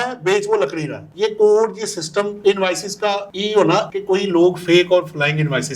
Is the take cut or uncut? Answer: cut